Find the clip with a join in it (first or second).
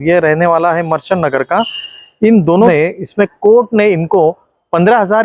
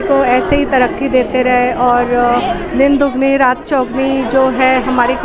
first